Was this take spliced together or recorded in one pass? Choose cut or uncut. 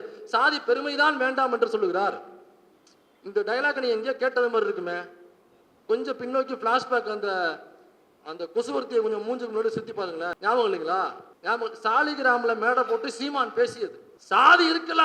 cut